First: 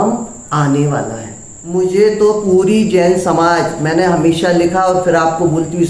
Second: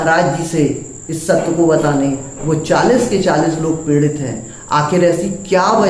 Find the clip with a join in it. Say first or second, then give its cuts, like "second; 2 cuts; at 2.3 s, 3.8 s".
first; 1 cut; at 1.5 s